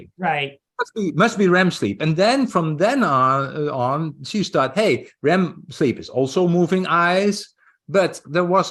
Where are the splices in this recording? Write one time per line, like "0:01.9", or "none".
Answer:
none